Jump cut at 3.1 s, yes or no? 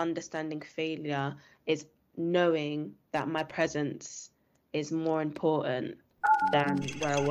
no